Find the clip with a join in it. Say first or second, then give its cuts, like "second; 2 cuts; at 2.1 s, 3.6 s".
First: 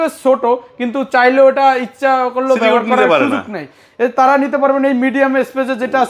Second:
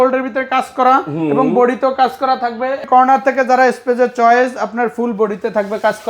second; 1 cut; at 2.8 s